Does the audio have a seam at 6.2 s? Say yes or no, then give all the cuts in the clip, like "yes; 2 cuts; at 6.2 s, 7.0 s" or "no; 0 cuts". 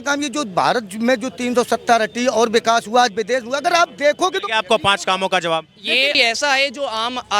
yes; 1 cut; at 6.2 s